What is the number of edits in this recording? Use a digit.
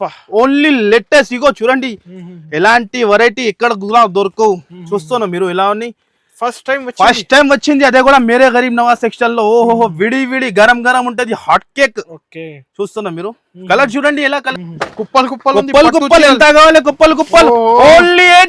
1